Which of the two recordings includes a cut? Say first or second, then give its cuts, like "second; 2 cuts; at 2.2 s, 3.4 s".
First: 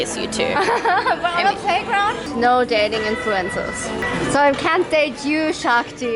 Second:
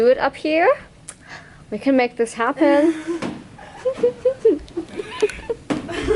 first; 2 cuts; at 2.3 s, 4.0 s